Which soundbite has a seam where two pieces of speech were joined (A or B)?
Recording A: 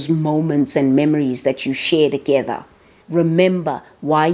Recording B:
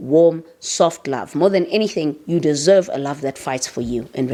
A